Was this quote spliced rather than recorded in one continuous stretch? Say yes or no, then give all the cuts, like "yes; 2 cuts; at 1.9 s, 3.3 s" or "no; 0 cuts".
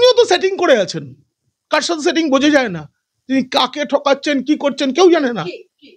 no; 0 cuts